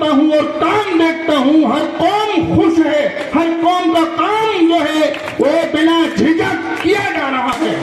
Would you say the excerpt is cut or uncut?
uncut